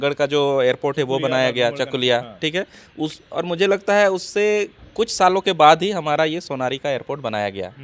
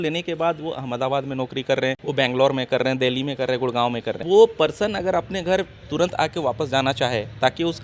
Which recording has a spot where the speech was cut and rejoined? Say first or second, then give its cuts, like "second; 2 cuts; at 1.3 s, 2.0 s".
second; 2 cuts; at 2.0 s, 4.2 s